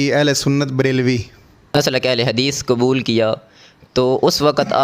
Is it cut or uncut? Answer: cut